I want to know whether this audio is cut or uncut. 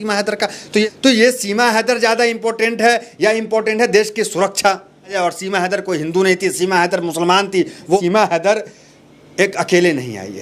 cut